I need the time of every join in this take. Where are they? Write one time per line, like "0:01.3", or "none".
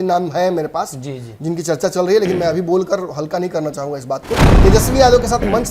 0:04.5